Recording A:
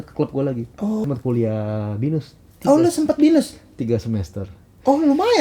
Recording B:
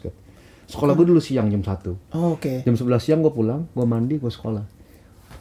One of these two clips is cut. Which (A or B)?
A